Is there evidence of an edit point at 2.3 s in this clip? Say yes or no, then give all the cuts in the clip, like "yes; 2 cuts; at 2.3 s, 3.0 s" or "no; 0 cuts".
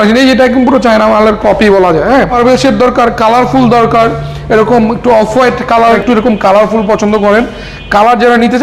yes; 2 cuts; at 2.3 s, 6.0 s